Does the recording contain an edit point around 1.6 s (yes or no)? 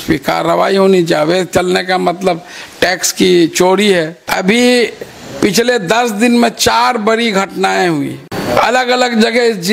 no